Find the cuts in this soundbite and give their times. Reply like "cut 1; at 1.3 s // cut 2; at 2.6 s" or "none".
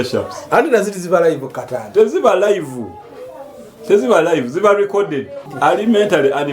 cut 1; at 5.4 s